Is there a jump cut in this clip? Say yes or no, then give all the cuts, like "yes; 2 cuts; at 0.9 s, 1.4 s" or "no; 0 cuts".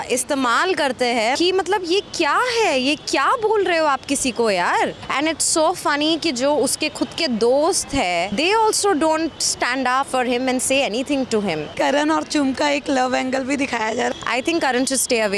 yes; 6 cuts; at 1.4 s, 5.0 s, 8.3 s, 10.1 s, 11.7 s, 14.1 s